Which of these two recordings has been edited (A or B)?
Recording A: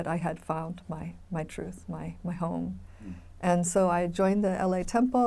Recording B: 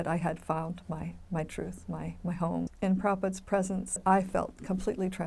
B